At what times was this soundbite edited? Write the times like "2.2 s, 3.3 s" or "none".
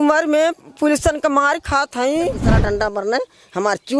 2.5 s